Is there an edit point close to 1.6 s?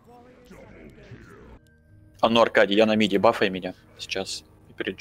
yes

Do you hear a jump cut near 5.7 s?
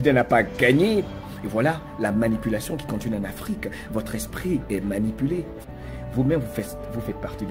yes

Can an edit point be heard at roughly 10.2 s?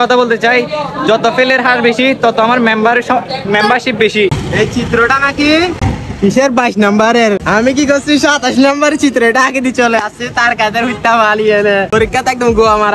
no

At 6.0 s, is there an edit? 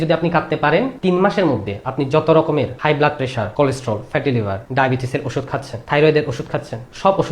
no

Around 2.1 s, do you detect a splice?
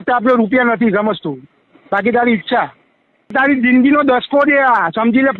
no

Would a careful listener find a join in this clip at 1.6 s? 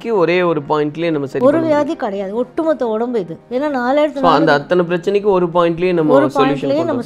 no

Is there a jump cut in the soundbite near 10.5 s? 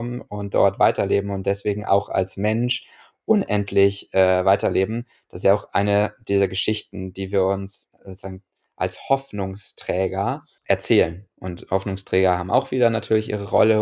yes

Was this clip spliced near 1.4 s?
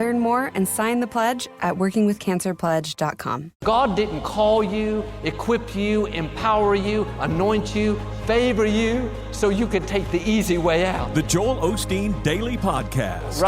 yes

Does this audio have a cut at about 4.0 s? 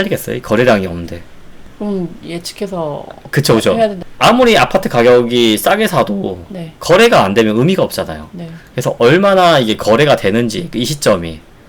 yes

